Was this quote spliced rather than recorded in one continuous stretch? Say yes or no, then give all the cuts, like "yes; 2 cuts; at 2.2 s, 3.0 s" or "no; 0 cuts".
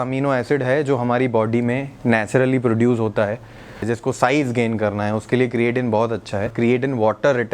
yes; 2 cuts; at 3.8 s, 6.5 s